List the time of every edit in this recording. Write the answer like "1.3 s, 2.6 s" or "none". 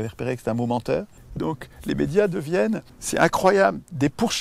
1.2 s, 2.9 s